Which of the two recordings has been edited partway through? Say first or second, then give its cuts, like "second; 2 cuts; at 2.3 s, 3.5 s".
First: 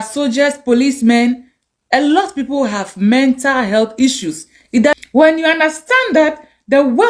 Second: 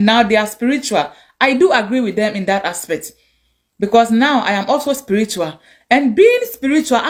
first; 1 cut; at 4.9 s